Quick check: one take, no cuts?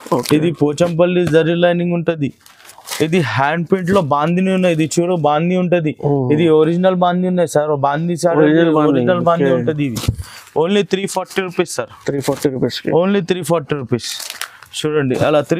yes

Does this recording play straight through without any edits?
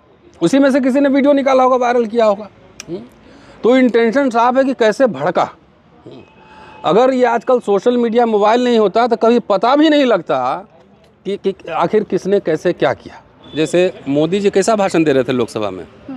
no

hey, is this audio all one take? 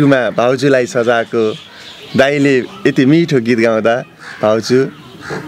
yes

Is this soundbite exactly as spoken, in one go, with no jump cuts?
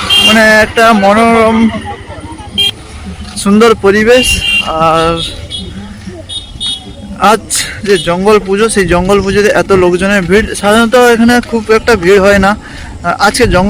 yes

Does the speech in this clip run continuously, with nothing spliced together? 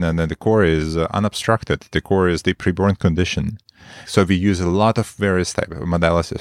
no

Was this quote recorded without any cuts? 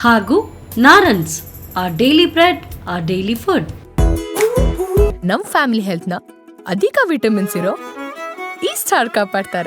no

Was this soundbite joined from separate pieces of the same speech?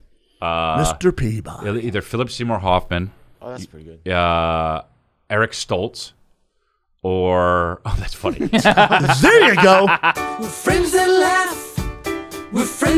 yes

